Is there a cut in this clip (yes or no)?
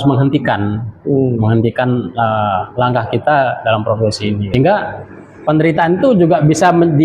yes